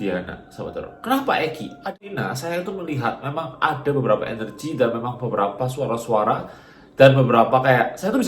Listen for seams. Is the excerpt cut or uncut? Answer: cut